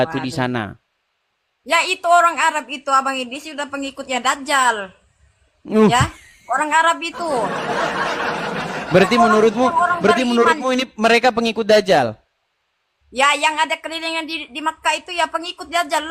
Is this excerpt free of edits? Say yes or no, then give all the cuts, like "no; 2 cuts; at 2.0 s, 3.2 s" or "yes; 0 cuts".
yes; 0 cuts